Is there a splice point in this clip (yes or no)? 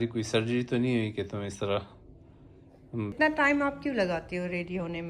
yes